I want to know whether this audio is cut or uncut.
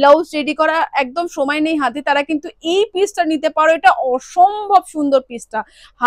uncut